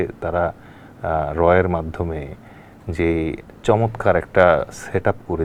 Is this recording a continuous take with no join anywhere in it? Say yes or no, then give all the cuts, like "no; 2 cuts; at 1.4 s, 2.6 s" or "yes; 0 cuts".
yes; 0 cuts